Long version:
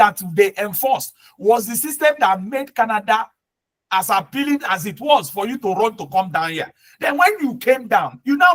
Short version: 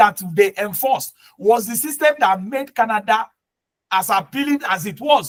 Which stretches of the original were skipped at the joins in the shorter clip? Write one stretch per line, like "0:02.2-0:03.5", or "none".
none